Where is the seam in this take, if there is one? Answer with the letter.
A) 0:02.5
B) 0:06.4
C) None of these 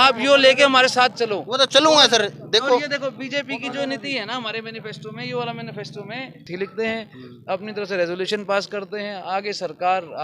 B